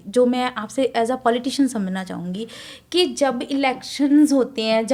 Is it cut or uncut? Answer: uncut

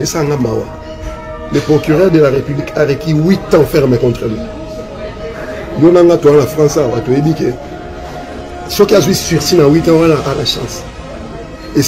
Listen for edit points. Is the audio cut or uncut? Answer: uncut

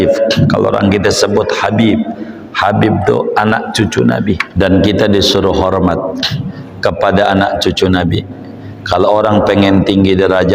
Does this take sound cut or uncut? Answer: cut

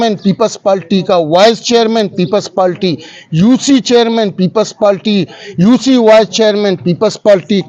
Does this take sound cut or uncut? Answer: uncut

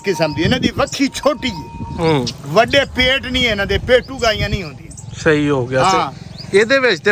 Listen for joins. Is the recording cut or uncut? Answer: uncut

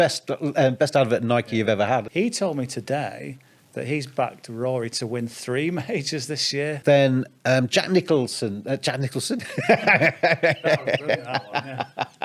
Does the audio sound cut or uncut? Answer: cut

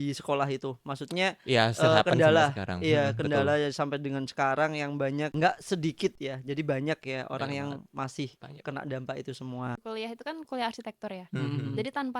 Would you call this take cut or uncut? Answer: cut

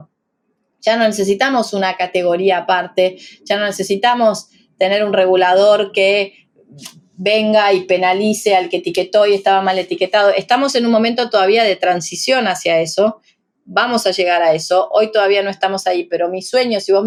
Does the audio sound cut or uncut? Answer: uncut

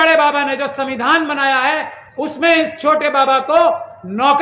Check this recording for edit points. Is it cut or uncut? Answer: uncut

